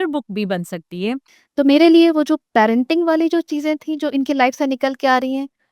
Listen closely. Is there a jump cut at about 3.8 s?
no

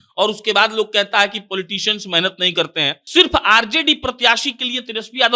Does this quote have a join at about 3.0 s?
yes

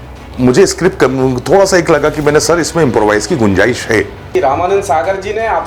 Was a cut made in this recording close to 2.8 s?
no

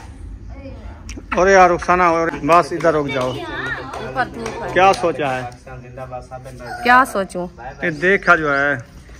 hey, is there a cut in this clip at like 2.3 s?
yes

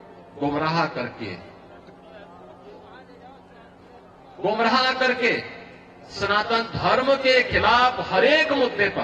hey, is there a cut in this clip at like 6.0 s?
no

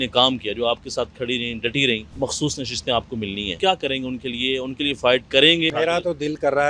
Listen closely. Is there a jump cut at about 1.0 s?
no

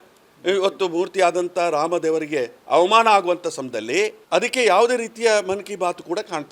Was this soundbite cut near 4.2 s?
yes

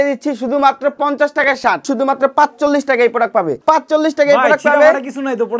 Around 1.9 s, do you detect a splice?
yes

